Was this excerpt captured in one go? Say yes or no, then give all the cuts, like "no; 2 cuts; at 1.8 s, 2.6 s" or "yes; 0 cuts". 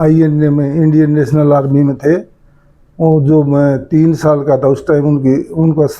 yes; 0 cuts